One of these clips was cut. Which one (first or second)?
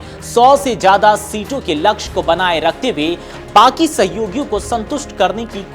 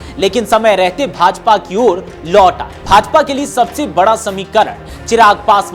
second